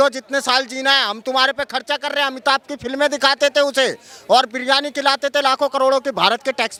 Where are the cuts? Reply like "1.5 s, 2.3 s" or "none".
none